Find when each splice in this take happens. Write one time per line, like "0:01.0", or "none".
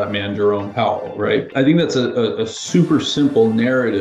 0:01.5